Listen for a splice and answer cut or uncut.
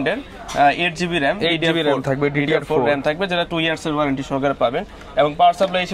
uncut